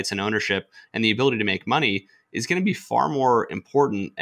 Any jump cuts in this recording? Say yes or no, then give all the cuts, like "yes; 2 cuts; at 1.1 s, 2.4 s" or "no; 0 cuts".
no; 0 cuts